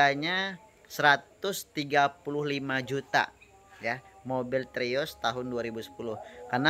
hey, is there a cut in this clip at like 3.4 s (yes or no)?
no